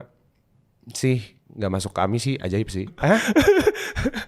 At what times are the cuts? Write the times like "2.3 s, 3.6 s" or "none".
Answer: 2.9 s